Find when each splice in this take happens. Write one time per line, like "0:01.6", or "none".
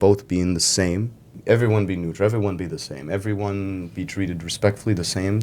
0:01.4

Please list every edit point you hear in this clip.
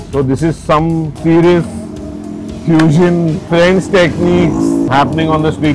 0:01.1
0:03.4
0:04.9

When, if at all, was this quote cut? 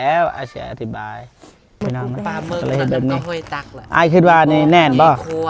0:01.8

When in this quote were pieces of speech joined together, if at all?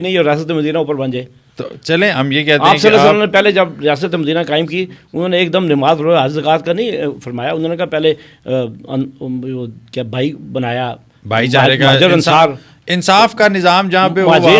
none

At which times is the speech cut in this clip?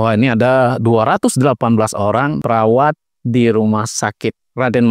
0:02.4

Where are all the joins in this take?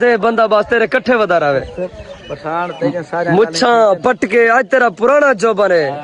none

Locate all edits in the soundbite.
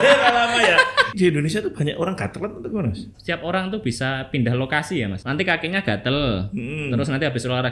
0:01.1
0:03.1
0:05.2

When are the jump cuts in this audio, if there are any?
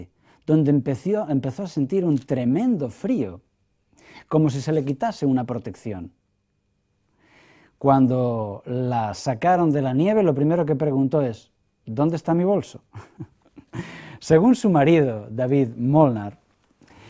0:01.3

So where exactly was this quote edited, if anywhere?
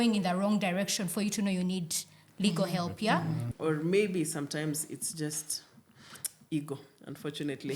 0:03.5

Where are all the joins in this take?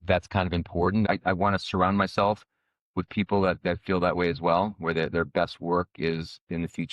0:01.1

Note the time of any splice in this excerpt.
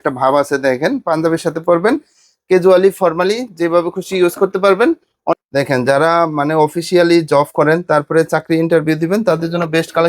0:05.3

